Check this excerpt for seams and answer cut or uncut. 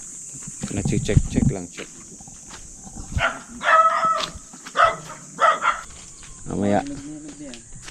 cut